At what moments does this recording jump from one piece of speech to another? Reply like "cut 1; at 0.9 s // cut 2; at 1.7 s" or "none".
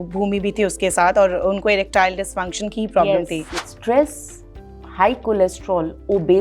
cut 1; at 3.7 s